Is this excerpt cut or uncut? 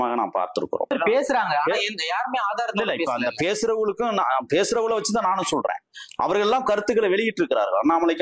cut